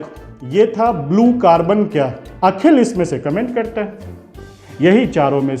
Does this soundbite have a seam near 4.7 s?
no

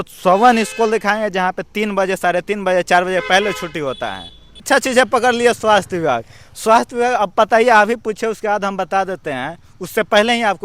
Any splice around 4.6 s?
yes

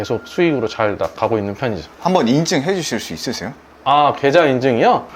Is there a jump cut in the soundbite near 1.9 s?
no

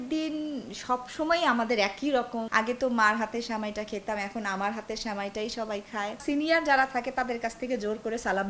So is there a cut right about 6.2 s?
yes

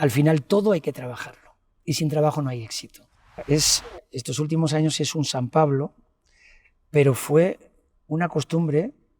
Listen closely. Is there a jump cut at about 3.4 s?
yes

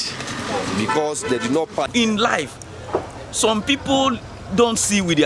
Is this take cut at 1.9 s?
yes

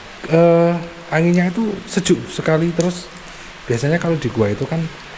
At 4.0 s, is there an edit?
no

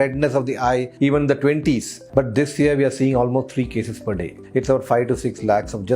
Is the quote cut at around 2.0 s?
yes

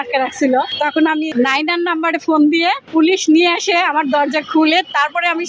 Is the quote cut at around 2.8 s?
yes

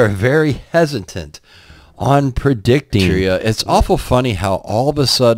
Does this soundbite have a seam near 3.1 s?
yes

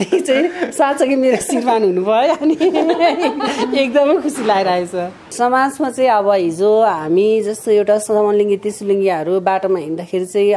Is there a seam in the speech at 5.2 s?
yes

